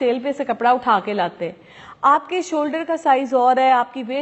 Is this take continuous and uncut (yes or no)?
yes